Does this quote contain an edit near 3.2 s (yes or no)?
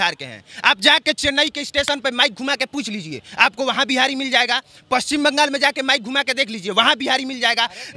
no